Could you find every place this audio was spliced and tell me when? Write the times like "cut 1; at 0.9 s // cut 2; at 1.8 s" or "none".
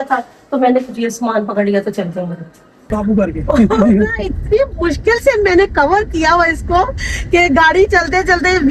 cut 1; at 2.9 s